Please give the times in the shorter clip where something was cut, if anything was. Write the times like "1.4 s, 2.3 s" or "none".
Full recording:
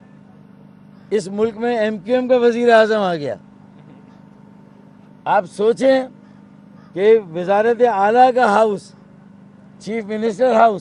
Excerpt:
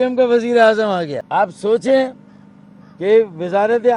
1.2 s